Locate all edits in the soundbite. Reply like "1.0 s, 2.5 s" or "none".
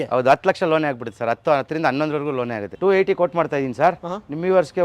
2.7 s